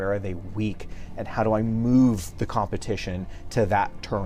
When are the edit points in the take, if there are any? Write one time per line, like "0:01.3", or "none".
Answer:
none